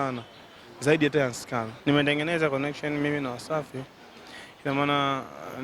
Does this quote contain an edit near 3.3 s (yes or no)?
no